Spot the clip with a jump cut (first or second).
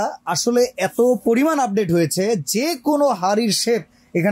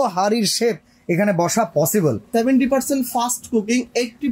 second